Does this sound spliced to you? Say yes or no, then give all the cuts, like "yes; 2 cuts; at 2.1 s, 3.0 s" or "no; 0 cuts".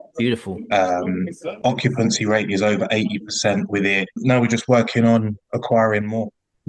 yes; 1 cut; at 4.2 s